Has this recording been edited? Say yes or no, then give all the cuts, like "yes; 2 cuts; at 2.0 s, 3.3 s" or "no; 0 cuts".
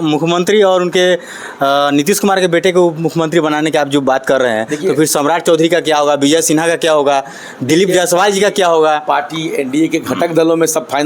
no; 0 cuts